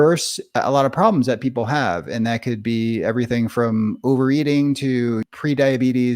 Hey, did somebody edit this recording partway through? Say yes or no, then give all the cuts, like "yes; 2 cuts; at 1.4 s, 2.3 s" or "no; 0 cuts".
yes; 1 cut; at 5.2 s